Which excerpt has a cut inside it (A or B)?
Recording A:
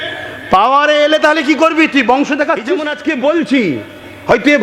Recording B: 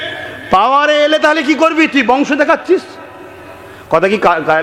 A